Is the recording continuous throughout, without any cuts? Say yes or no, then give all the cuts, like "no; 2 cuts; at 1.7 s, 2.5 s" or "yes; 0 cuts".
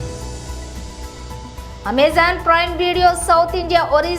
no; 1 cut; at 1.0 s